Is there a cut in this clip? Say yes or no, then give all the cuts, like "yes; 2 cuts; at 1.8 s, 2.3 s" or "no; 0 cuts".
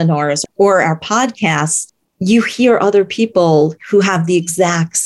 no; 0 cuts